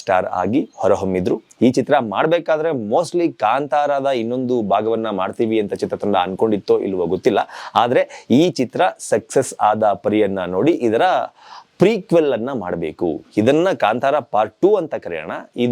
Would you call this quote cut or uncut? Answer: uncut